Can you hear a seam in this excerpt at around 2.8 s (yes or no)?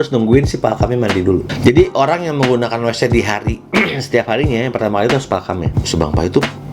no